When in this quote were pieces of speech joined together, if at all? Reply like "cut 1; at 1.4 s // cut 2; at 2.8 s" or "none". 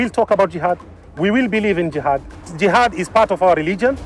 cut 1; at 2.4 s